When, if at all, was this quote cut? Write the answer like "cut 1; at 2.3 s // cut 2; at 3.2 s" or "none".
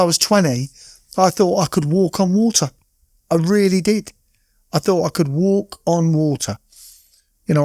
none